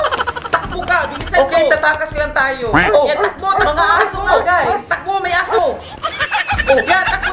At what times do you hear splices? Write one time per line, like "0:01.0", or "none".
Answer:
0:02.8